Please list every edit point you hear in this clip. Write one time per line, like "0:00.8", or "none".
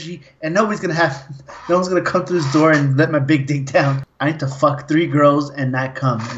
0:04.1